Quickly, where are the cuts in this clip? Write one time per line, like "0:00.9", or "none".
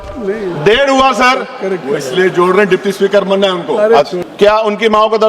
0:04.2